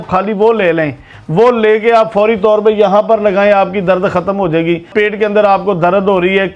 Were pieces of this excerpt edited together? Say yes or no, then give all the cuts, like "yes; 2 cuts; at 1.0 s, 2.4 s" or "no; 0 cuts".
no; 0 cuts